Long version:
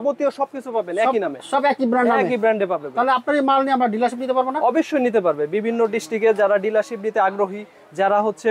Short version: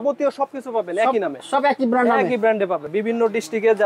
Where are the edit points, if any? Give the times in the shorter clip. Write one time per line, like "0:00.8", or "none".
0:02.9